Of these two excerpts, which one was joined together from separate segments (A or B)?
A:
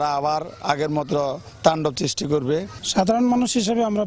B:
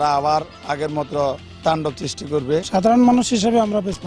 B